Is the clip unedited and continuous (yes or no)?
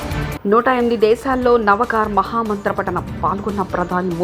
yes